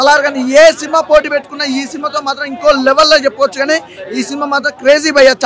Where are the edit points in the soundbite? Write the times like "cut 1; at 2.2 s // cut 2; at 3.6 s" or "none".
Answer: none